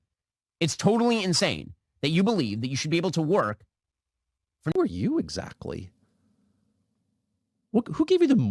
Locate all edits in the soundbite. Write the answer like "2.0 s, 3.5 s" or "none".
4.7 s